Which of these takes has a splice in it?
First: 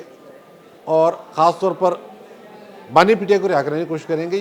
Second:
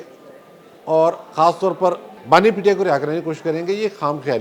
second; 1 cut; at 2.1 s

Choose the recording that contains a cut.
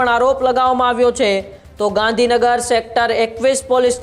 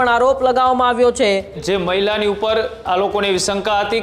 second; 1 cut; at 1.6 s

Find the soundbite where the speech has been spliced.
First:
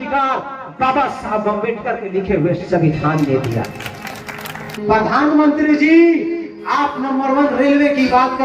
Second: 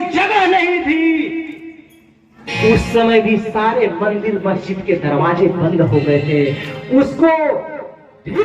first; 1 cut; at 4.7 s

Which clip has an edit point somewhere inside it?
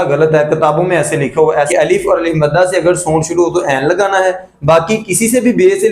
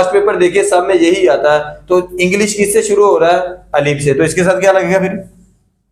first; 1 cut; at 1.7 s

